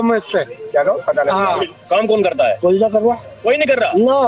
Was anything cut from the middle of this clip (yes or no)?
yes